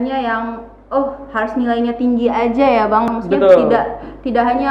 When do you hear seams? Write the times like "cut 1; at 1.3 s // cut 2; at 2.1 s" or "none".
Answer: cut 1; at 3.1 s